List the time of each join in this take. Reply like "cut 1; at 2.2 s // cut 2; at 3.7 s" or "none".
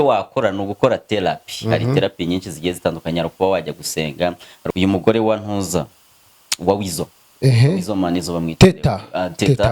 cut 1; at 4.6 s